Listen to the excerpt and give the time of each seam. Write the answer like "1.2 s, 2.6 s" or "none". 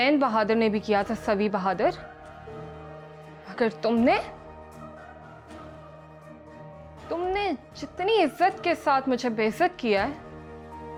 none